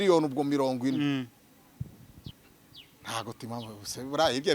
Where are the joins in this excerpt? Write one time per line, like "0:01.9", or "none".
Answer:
0:02.3